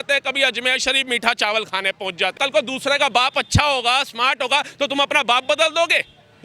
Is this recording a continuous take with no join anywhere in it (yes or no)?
no